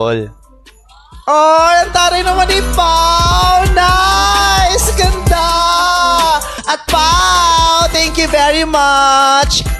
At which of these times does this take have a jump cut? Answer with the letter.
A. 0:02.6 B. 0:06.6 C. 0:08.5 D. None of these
B